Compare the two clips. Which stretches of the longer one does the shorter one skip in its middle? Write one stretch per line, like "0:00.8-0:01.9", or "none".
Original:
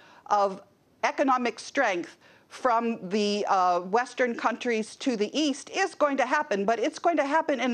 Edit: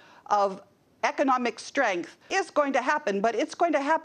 0:02.2-0:05.7